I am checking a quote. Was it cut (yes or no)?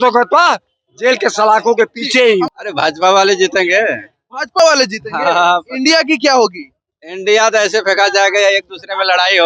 yes